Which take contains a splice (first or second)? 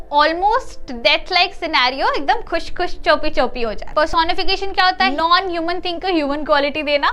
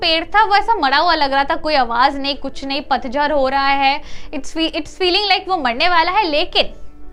first